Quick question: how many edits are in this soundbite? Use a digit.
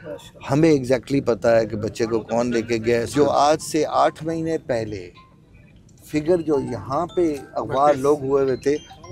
1